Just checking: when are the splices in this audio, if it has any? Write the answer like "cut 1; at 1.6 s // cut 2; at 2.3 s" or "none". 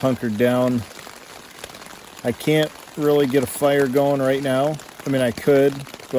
none